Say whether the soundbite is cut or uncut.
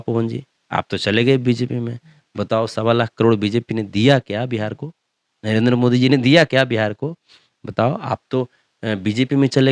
uncut